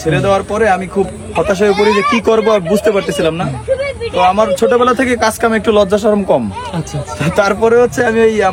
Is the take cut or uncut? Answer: uncut